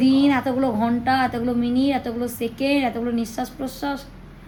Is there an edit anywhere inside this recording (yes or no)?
no